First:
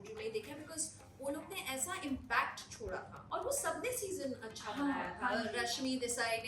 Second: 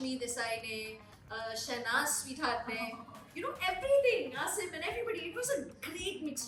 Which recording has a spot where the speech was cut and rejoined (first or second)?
first